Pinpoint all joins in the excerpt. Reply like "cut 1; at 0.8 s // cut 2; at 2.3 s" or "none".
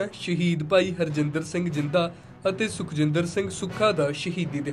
none